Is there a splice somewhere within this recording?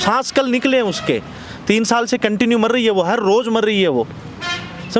no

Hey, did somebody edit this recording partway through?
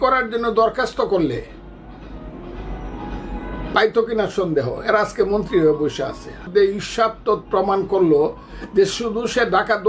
yes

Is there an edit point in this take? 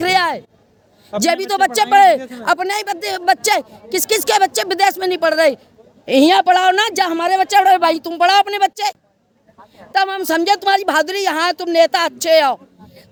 no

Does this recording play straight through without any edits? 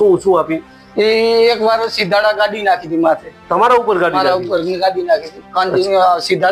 yes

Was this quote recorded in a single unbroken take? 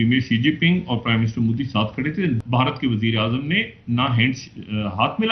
no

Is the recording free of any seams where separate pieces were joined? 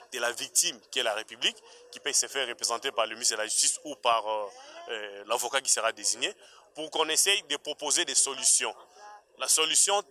yes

